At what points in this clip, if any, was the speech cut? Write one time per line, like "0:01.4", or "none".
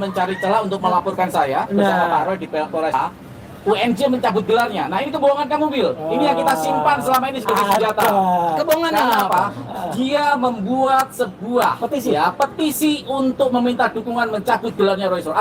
0:02.9